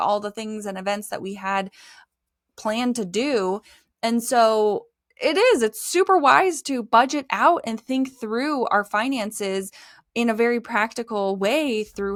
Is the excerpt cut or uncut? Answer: uncut